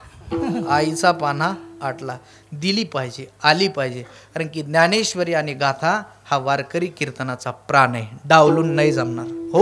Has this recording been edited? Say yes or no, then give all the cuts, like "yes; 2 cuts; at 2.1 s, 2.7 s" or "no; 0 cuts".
no; 0 cuts